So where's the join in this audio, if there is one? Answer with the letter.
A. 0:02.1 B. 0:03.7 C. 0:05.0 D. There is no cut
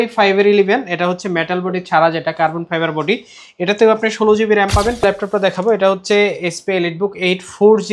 C